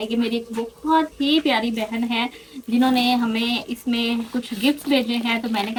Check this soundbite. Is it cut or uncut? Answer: uncut